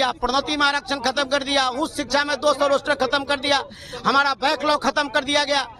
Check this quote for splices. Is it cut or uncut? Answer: uncut